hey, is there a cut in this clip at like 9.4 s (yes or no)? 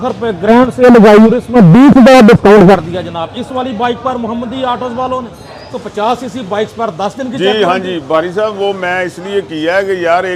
no